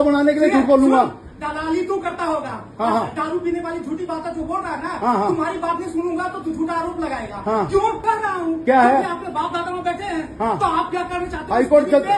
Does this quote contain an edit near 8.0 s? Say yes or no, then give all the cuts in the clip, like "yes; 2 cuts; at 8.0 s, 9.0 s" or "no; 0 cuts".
yes; 1 cut; at 8.0 s